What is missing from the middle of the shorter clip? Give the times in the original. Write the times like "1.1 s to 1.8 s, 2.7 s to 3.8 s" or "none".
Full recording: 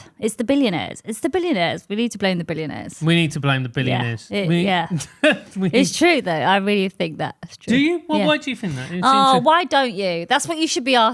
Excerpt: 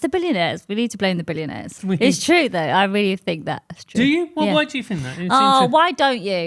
2.9 s to 5.5 s